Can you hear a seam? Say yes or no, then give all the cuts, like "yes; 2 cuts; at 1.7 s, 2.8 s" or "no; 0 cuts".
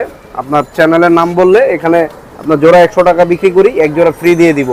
no; 0 cuts